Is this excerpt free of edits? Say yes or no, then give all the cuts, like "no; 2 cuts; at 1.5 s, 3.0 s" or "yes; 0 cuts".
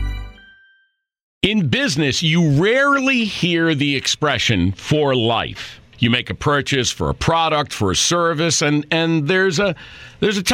no; 1 cut; at 1.3 s